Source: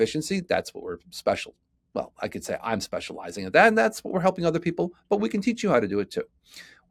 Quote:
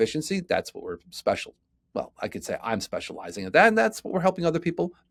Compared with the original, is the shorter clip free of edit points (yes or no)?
yes